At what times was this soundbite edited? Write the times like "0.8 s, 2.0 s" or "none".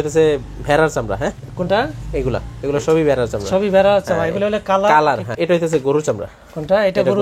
5.3 s